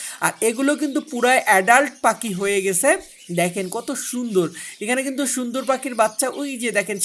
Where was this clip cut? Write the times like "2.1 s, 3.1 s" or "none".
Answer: none